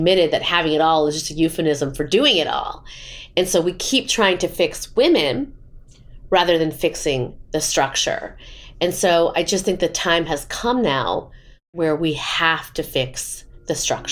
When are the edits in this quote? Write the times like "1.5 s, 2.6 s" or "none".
none